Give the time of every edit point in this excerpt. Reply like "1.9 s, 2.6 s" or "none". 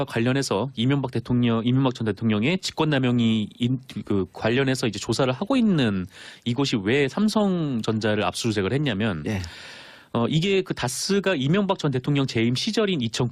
6.8 s

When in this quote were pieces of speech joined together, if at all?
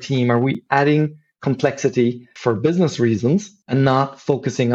3.6 s

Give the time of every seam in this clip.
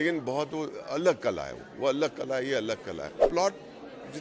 3.3 s

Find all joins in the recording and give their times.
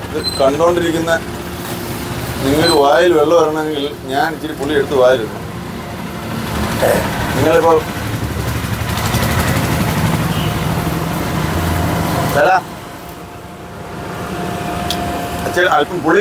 none

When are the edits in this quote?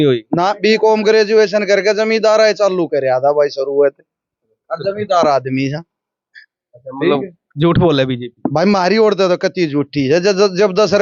none

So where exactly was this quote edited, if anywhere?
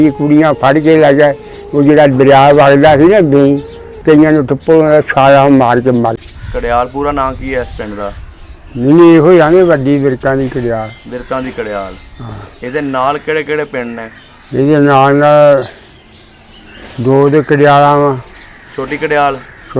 6.2 s

